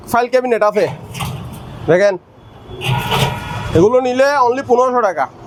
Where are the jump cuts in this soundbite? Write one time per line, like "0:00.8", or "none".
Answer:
none